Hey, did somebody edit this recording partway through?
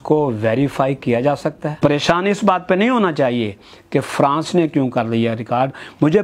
yes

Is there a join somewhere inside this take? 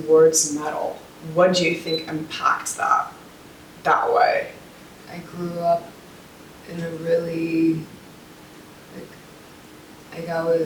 no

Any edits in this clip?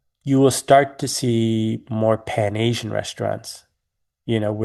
no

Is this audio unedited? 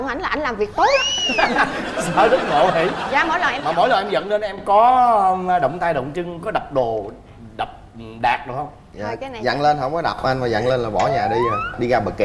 yes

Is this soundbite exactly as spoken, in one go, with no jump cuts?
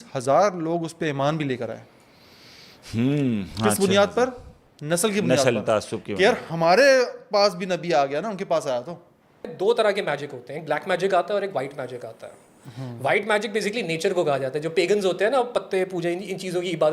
no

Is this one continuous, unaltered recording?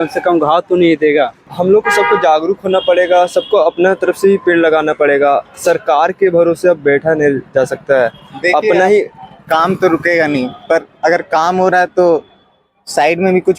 no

